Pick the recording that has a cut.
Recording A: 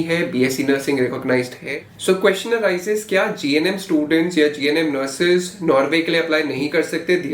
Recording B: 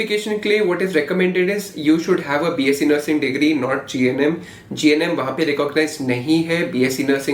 A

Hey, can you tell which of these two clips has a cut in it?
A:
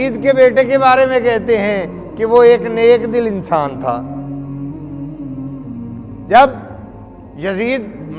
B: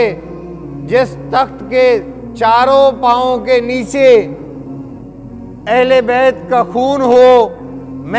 A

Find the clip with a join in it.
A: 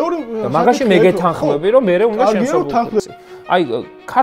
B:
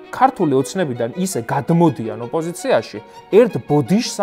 A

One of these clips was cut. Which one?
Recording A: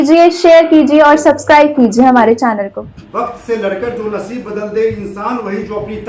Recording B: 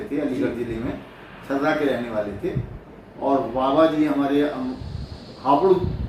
A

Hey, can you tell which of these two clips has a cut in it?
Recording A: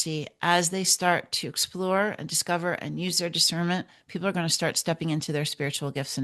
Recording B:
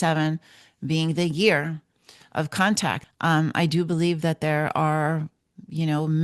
B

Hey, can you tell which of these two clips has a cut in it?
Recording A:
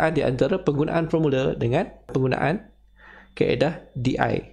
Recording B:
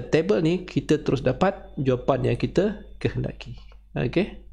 A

